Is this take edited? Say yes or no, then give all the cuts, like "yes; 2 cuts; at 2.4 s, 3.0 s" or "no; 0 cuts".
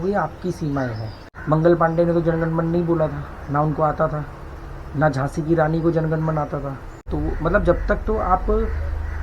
yes; 2 cuts; at 1.3 s, 7.1 s